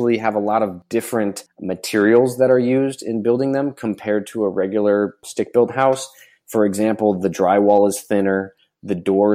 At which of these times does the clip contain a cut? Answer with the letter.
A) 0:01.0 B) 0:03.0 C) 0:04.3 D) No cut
A